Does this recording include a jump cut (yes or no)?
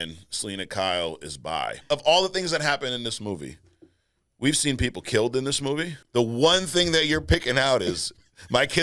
yes